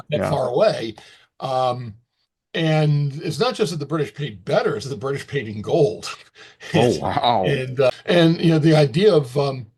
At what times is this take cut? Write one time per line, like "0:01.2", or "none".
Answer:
0:07.9

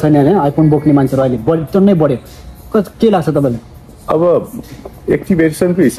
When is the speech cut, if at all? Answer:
none

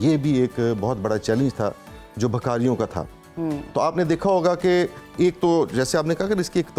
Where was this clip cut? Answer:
none

